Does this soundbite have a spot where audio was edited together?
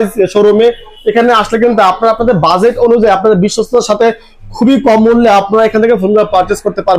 no; 0 cuts

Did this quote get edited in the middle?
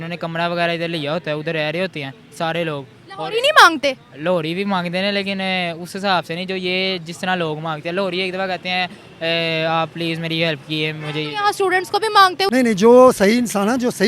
yes; 1 cut; at 12.5 s

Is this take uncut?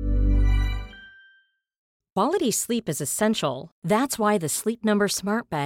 no; 1 cut; at 1.8 s

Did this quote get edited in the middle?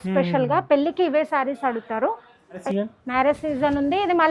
yes; 1 cut; at 2.6 s

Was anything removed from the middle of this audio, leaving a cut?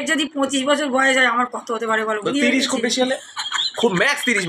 no; 0 cuts

